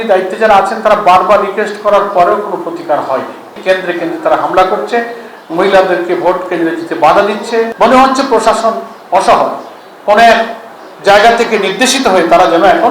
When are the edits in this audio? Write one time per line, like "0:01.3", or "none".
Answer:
0:03.5
0:07.7